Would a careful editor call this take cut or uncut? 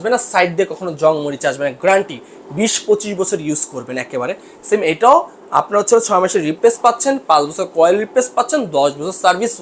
uncut